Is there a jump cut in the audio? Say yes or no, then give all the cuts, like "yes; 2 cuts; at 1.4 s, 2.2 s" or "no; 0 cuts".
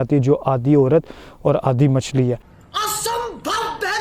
yes; 1 cut; at 2.5 s